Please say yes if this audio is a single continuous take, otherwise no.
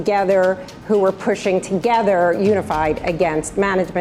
yes